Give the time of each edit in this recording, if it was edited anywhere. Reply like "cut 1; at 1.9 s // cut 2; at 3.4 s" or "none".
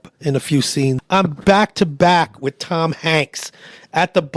cut 1; at 1.0 s